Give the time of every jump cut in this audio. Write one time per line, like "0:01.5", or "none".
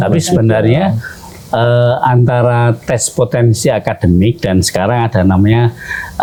none